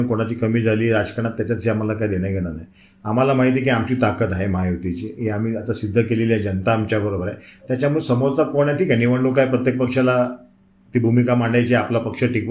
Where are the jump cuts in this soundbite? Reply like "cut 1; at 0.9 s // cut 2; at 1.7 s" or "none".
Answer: none